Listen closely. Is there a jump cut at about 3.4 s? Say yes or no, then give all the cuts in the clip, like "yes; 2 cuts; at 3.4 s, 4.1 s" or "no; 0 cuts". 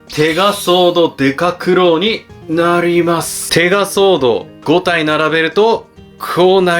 yes; 1 cut; at 3.4 s